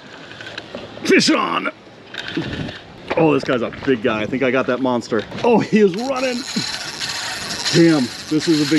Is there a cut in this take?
yes; 2 cuts; at 2.9 s, 5.3 s

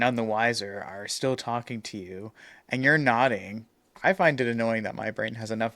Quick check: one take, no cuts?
no; 1 cut; at 3.9 s

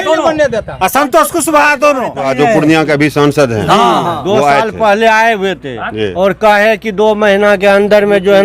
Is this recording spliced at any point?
yes; 1 cut; at 2.3 s

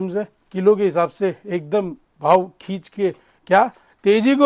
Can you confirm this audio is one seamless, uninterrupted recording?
yes; 0 cuts

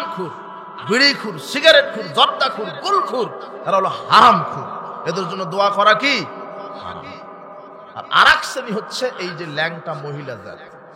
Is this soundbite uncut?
yes; 0 cuts

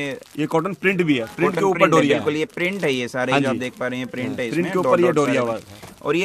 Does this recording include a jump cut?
no; 0 cuts

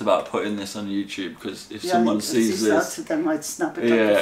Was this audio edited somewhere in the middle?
no; 0 cuts

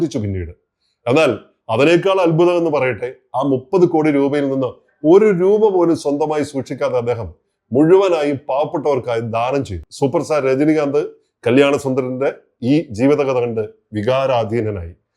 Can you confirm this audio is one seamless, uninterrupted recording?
no; 1 cut; at 9.8 s

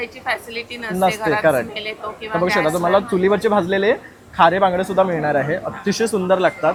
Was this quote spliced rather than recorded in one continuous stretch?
no; 0 cuts

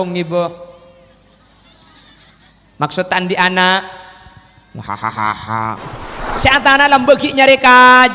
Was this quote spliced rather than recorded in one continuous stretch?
yes; 1 cut; at 6.2 s

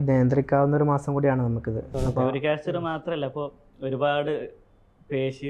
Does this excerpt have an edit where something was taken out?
yes; 1 cut; at 1.9 s

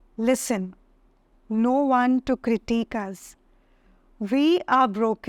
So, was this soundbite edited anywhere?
no; 0 cuts

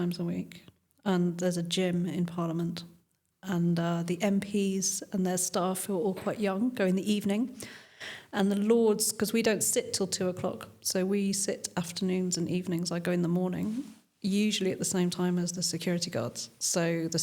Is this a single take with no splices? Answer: yes; 0 cuts

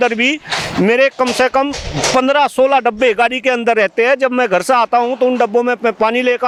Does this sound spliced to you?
no; 0 cuts

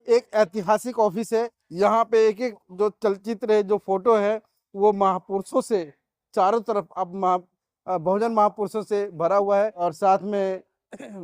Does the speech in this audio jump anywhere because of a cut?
yes; 2 cuts; at 1.6 s, 9.8 s

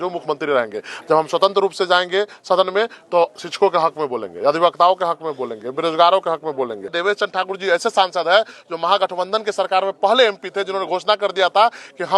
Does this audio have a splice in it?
yes; 1 cut; at 7.0 s

